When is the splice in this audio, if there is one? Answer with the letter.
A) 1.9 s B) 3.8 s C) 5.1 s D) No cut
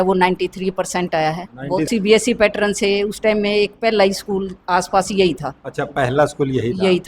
A